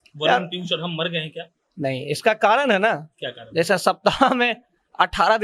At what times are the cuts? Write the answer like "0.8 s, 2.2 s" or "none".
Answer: none